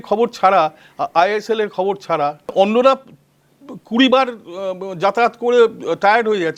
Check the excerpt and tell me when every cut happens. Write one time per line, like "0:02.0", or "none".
0:02.5